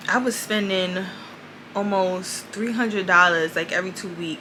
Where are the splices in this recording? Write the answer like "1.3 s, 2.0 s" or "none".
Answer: none